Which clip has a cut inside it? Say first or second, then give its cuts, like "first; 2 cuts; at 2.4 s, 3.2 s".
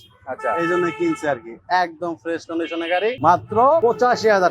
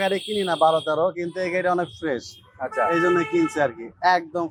first; 2 cuts; at 3.2 s, 3.8 s